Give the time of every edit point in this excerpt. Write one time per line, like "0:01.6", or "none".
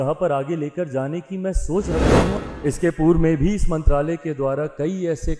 0:02.3